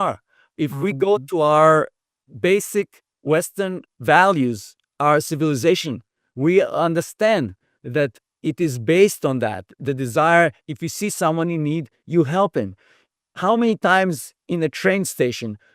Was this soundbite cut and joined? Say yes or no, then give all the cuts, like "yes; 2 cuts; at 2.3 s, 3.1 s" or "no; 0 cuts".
yes; 2 cuts; at 3.0 s, 3.9 s